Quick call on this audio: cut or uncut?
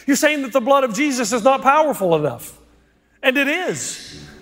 uncut